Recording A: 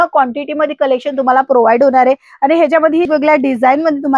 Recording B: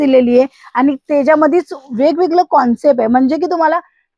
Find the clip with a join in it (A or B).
A